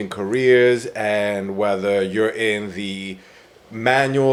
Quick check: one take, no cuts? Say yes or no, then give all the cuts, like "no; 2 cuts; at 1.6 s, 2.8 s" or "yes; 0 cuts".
yes; 0 cuts